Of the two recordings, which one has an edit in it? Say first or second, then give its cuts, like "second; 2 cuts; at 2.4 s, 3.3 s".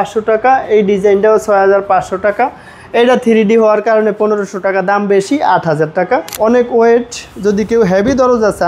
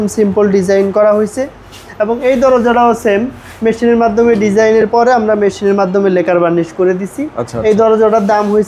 first; 1 cut; at 6.3 s